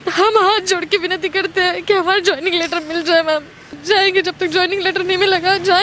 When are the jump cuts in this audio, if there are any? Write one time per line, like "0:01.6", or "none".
0:03.6